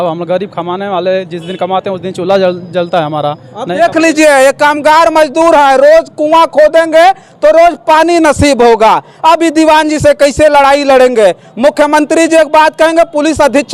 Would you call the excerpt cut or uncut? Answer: uncut